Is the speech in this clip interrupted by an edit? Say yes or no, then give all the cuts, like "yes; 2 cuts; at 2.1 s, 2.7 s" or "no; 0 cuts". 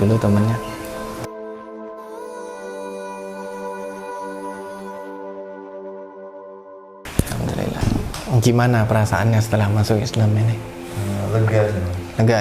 yes; 1 cut; at 7.8 s